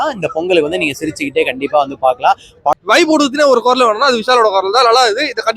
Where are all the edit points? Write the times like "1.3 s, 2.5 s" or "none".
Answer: 2.7 s